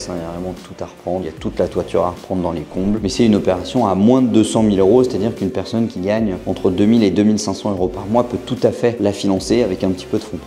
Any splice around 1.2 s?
yes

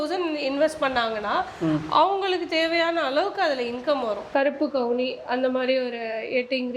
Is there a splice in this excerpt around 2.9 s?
no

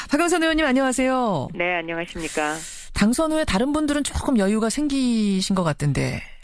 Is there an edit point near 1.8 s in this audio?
yes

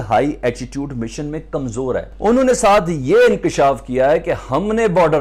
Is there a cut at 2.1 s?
yes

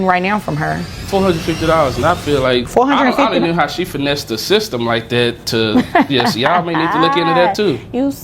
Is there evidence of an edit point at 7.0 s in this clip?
no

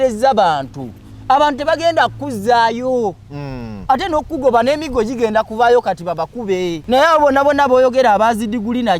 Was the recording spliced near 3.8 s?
no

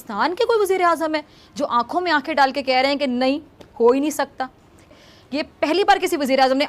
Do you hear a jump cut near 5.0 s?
yes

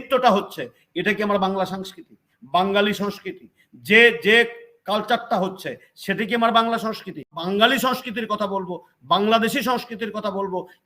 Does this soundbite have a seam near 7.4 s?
yes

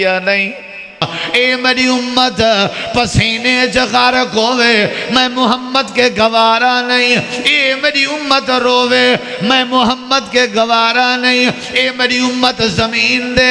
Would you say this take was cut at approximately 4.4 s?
no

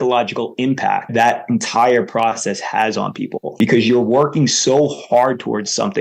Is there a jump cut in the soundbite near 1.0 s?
yes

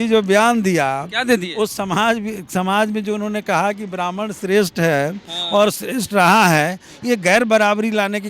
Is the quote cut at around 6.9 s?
no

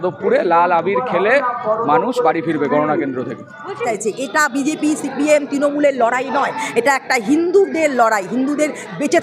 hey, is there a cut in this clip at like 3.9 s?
yes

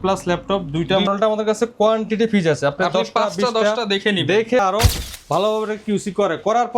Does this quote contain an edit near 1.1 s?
yes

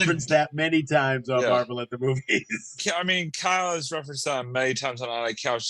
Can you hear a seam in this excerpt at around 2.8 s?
yes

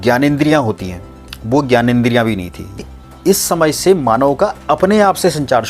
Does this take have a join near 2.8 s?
yes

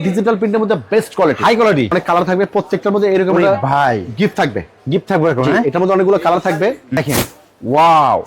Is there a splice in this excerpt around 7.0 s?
yes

